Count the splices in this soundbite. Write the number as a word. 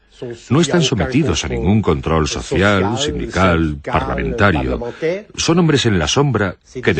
one